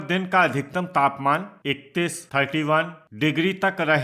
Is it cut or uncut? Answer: cut